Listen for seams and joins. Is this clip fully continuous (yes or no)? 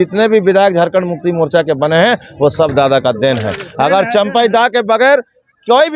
yes